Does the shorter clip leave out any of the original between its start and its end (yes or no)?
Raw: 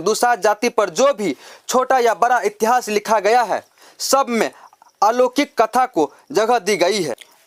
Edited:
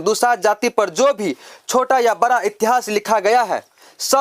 no